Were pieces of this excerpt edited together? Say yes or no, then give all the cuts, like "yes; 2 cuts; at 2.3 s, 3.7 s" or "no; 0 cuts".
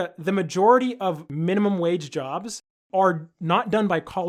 yes; 2 cuts; at 1.3 s, 2.6 s